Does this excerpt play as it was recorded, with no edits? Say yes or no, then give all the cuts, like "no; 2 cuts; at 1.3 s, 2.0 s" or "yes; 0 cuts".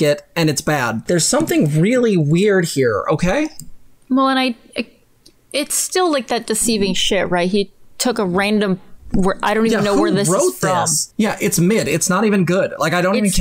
no; 2 cuts; at 1.0 s, 11.0 s